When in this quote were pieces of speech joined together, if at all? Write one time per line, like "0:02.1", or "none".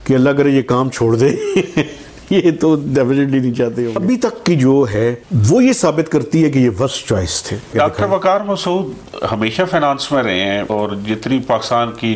0:03.9
0:07.7
0:10.7